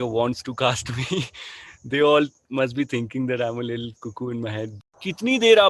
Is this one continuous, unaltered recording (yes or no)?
no